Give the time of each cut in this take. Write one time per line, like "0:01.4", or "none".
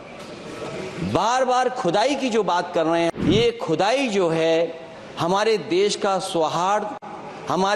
0:03.1

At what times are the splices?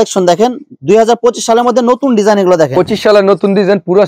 0:02.7

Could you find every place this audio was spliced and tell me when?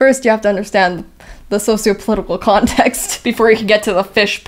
none

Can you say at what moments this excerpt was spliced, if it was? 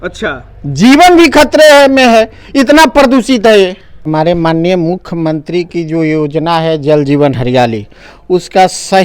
0:04.1

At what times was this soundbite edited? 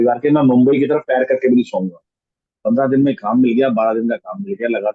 0:02.3

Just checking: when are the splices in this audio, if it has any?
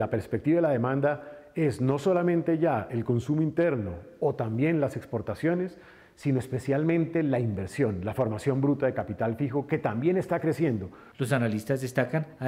none

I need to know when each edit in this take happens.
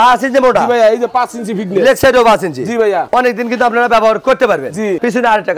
none

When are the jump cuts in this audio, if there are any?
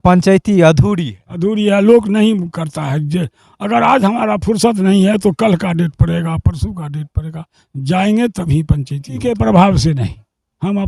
0:09.2

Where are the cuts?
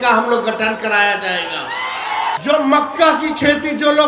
0:02.4

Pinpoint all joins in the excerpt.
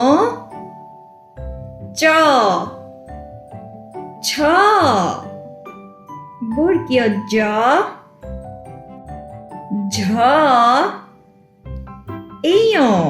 0:08.1
0:09.7

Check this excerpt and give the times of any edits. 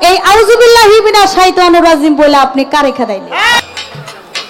0:03.6

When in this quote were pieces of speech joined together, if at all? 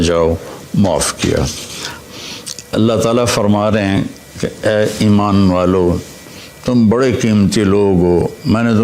0:02.0

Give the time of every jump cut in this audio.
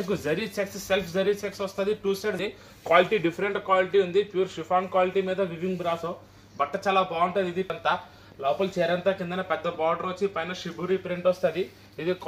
0:02.4
0:07.7

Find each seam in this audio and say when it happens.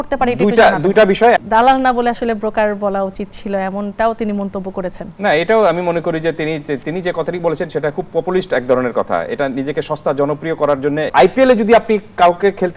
0:01.4
0:11.1

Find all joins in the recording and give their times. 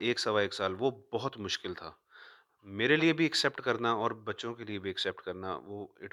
none

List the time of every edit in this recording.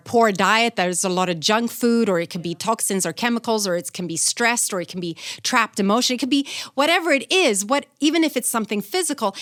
none

